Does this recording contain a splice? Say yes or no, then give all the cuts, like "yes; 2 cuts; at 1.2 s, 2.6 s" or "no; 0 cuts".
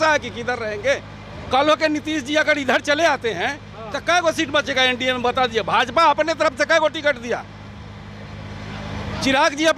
no; 0 cuts